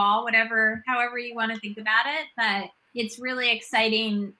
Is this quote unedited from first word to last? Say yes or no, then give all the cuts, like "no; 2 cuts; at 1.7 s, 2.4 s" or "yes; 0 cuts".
no; 1 cut; at 2.8 s